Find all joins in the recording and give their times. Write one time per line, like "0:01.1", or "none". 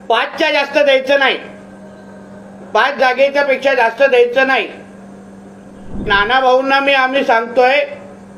0:06.1